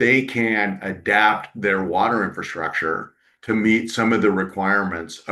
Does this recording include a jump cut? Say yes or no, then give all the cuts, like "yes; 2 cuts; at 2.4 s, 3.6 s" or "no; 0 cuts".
no; 0 cuts